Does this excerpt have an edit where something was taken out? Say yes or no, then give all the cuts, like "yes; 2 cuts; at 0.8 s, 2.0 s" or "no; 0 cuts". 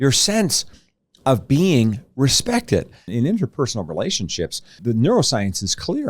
yes; 2 cuts; at 3.1 s, 4.8 s